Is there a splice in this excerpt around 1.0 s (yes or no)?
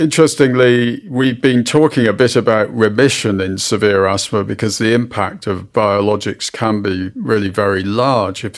yes